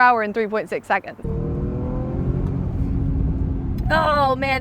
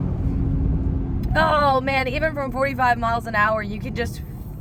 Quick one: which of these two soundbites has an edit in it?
first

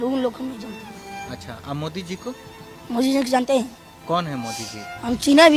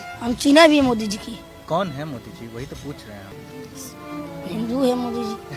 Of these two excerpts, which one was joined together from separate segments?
second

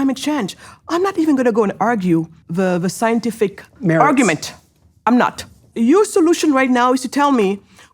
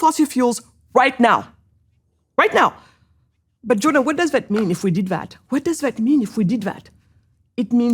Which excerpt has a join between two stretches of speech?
first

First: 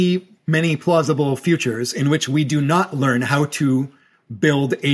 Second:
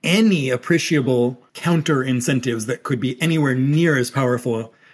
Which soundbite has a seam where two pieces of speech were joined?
second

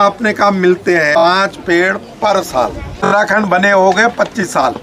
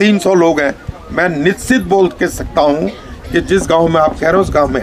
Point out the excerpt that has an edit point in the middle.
first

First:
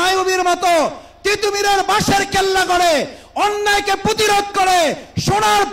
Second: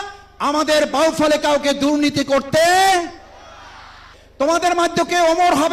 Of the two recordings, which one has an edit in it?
second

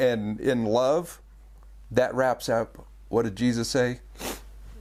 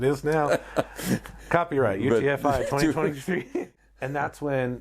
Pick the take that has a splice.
second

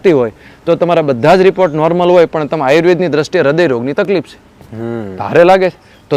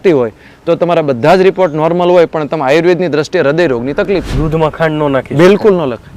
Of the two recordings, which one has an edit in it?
second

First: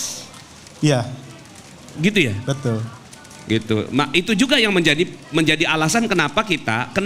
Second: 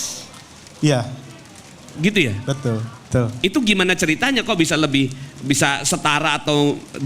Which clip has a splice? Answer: second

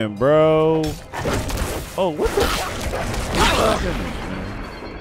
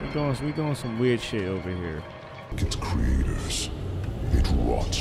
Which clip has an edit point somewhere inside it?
second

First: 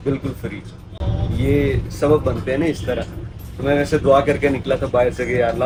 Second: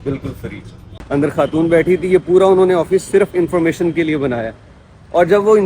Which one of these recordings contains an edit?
second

